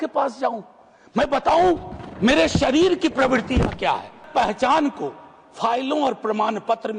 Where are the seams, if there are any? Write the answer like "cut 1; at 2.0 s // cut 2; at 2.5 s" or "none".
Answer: cut 1; at 4.3 s